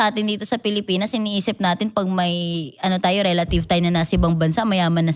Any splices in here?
no; 0 cuts

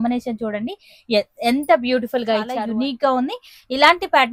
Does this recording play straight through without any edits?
no; 1 cut; at 2.5 s

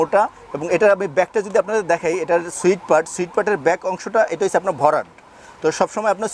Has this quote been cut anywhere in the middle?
no; 0 cuts

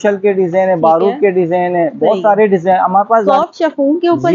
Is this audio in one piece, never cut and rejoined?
no; 1 cut; at 3.3 s

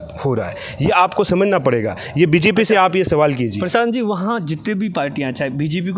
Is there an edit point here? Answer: no; 0 cuts

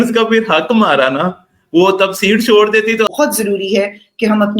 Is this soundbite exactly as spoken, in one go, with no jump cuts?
no; 1 cut; at 3.1 s

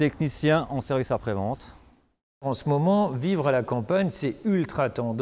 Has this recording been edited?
yes; 1 cut; at 2.4 s

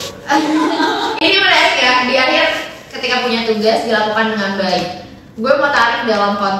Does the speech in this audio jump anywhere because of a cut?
no; 0 cuts

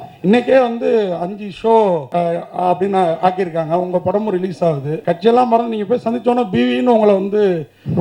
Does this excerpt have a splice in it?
yes; 2 cuts; at 2.1 s, 4.9 s

